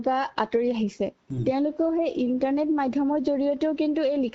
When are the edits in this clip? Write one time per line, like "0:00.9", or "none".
0:01.3

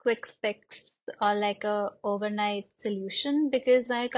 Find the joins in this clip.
none

